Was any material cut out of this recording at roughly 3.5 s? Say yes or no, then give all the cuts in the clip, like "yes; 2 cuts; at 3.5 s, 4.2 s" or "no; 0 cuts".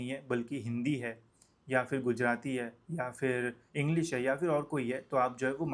no; 0 cuts